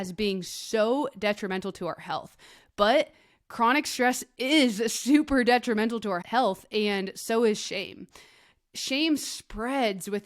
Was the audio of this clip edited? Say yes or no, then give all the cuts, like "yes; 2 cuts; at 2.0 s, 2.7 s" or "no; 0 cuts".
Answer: yes; 1 cut; at 6.2 s